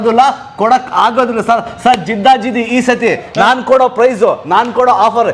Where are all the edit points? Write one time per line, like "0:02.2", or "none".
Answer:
none